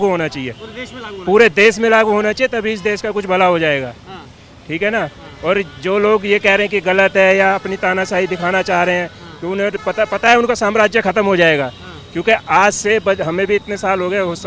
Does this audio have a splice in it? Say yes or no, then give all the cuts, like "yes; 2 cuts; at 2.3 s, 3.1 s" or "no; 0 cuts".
no; 0 cuts